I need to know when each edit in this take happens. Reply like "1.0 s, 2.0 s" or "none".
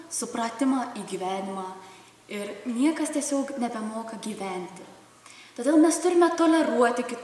none